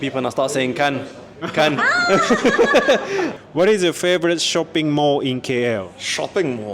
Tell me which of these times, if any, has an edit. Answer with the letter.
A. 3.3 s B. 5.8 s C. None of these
A